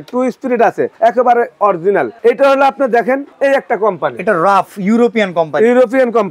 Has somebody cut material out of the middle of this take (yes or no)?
yes